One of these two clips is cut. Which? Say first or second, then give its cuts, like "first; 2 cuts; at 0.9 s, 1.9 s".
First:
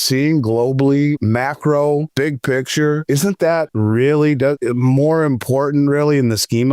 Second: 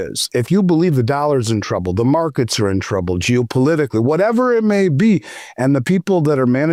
first; 4 cuts; at 1.2 s, 2.1 s, 3.4 s, 4.6 s